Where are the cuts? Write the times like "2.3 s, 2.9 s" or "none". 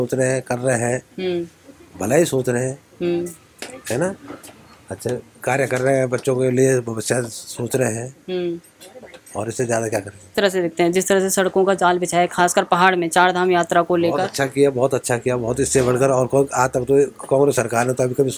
10.2 s